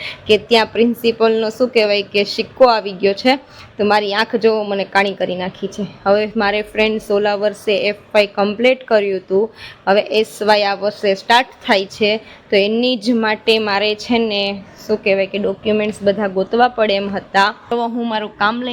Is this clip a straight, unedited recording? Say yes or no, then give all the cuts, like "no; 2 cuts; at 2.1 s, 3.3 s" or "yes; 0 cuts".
no; 1 cut; at 17.7 s